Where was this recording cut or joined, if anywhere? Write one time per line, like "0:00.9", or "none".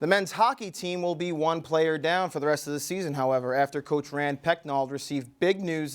none